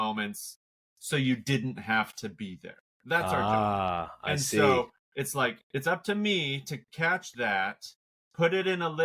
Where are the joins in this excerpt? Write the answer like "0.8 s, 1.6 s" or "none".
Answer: none